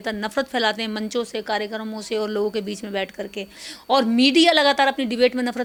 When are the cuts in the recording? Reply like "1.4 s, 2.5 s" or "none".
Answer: none